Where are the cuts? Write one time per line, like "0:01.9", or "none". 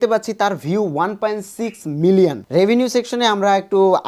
0:02.4